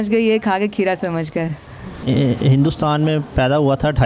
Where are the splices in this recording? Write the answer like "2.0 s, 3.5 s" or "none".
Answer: 2.0 s